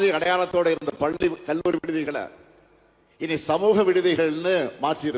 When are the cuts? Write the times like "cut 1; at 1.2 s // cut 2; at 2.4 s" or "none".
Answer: none